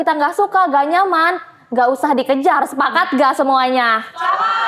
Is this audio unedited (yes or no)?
yes